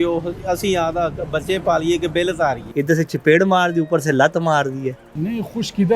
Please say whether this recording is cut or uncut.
cut